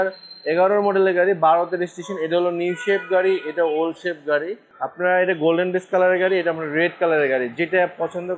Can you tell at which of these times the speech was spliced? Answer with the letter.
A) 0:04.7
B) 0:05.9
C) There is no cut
A